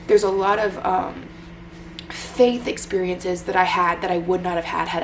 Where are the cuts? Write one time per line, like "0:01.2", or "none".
none